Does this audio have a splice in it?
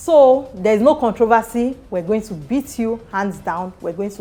no; 0 cuts

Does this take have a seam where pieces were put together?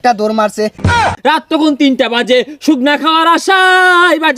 yes; 1 cut; at 1.0 s

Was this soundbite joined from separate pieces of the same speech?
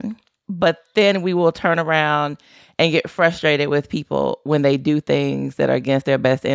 no; 0 cuts

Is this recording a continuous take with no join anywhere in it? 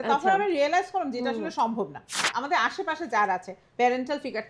no; 2 cuts; at 2.2 s, 3.6 s

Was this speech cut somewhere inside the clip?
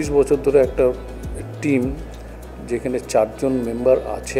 no; 0 cuts

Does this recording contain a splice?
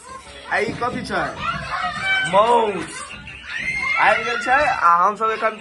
no; 0 cuts

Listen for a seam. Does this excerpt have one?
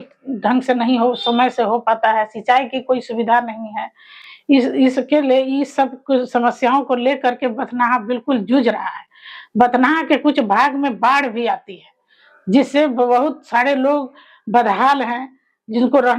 no; 0 cuts

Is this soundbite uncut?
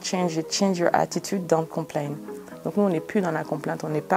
yes; 0 cuts

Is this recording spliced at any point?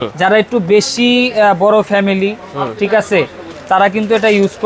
no; 0 cuts

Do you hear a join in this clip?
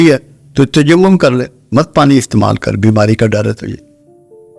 no; 0 cuts

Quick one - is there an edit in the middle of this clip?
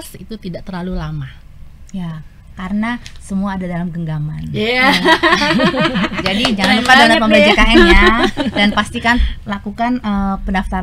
no; 0 cuts

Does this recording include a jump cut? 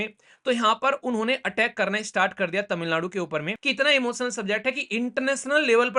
yes; 1 cut; at 3.6 s

